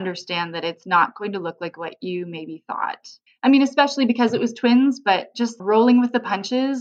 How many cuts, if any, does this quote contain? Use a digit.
0